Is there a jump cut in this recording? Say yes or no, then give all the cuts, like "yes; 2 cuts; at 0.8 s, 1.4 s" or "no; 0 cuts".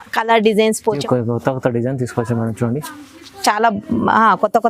yes; 1 cut; at 1.0 s